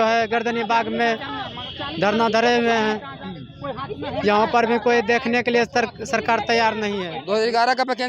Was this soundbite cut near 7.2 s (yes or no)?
yes